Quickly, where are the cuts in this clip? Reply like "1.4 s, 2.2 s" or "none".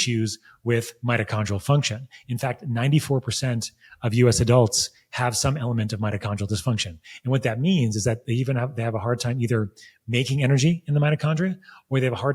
none